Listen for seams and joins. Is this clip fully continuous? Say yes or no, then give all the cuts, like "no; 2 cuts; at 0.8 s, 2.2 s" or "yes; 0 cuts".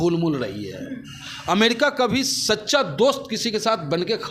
yes; 0 cuts